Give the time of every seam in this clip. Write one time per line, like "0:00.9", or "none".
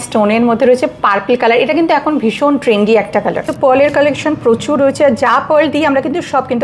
0:03.5